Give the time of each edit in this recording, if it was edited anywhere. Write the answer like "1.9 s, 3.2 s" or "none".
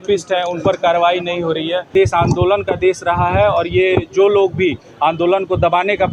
1.9 s